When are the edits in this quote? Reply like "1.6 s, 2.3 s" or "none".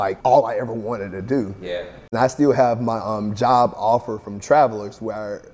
2.1 s